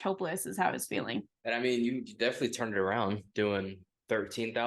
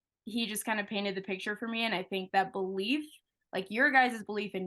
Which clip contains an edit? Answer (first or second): first